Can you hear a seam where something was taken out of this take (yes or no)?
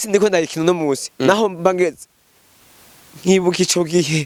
no